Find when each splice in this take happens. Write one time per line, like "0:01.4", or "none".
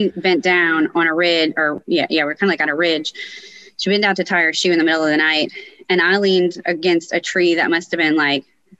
none